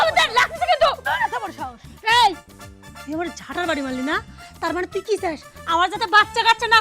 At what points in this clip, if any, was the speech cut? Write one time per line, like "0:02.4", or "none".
none